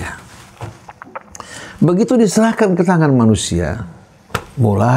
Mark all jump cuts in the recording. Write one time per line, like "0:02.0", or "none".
none

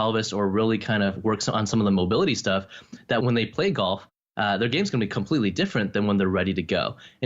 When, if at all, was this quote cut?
0:03.2

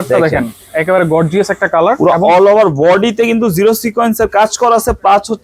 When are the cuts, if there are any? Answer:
none

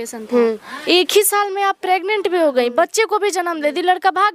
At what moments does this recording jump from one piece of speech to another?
none

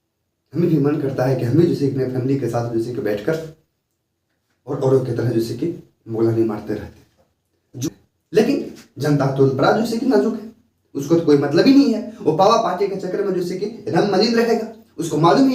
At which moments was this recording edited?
0:07.9

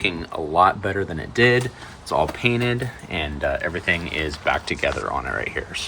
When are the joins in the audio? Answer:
none

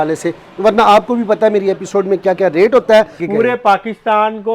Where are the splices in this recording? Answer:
0:03.2

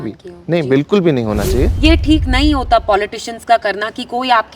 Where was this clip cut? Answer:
0:01.7

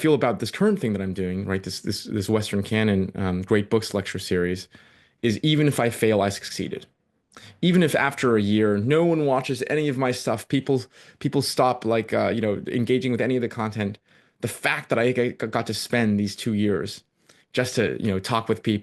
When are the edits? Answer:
none

